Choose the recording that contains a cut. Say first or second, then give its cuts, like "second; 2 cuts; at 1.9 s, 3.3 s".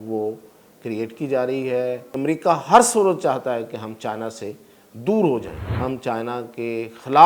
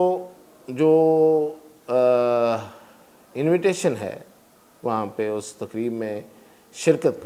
first; 2 cuts; at 2.1 s, 5.6 s